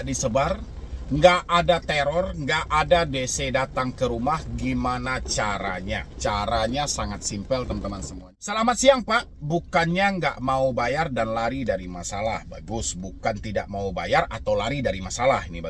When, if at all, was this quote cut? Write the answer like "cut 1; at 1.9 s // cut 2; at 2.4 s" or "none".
cut 1; at 8.1 s